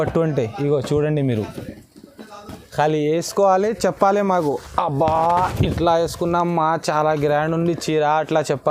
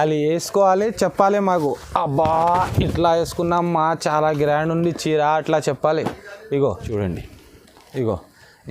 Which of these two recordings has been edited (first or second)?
second